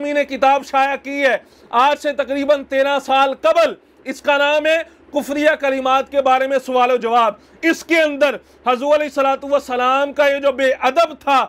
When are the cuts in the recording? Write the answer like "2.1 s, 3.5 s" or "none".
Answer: none